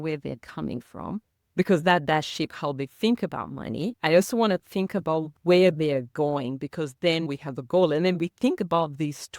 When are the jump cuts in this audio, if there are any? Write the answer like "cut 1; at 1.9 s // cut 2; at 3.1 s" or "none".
cut 1; at 4.0 s